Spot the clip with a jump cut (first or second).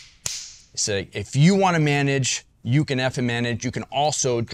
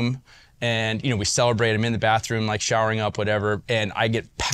second